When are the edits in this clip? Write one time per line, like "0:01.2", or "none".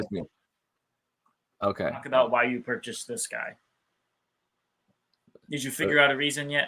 0:02.1